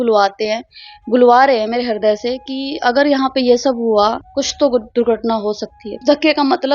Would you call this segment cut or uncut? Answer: cut